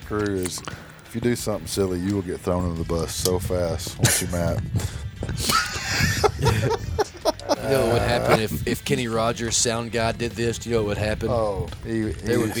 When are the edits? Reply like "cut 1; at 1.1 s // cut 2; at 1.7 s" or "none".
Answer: cut 1; at 7.6 s // cut 2; at 11.7 s